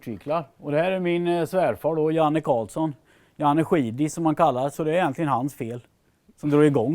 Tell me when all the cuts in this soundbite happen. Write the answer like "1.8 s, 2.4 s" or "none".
4.7 s